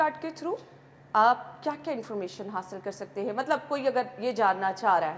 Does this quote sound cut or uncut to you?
uncut